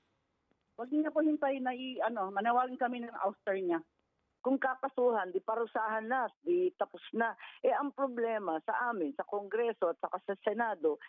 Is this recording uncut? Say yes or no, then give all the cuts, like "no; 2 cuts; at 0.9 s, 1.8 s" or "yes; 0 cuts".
no; 1 cut; at 4.2 s